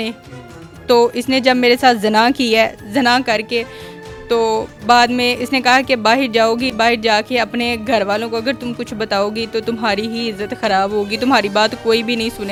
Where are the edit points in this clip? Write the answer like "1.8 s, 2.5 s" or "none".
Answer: none